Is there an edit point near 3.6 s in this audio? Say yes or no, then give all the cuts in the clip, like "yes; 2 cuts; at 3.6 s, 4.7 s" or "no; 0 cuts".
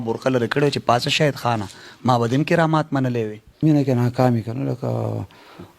yes; 1 cut; at 3.6 s